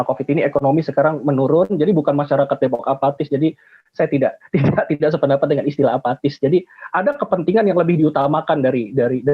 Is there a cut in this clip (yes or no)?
no